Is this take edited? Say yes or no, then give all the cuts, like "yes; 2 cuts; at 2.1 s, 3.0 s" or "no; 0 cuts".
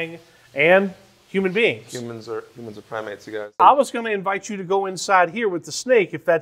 yes; 1 cut; at 3.6 s